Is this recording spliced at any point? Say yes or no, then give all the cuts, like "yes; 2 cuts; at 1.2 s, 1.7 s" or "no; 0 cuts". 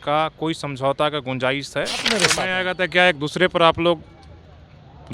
yes; 1 cut; at 2.1 s